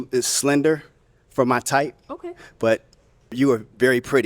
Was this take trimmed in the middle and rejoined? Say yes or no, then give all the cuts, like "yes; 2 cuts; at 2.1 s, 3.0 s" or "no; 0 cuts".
yes; 1 cut; at 3.3 s